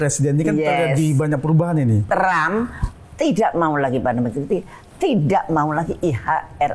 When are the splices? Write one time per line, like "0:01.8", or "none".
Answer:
0:02.0